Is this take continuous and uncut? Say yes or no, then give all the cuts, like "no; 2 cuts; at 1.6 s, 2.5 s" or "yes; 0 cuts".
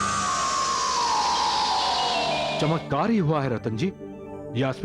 no; 1 cut; at 2.5 s